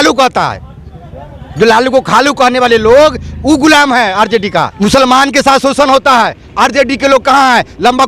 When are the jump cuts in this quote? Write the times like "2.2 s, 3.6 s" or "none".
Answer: 4.7 s